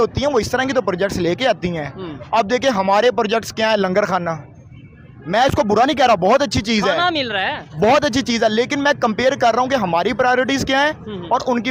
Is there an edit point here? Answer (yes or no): no